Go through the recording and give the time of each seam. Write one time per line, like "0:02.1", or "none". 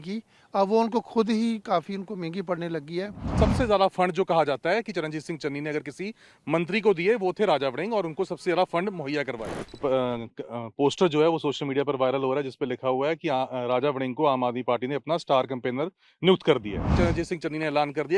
0:03.3
0:09.7
0:16.9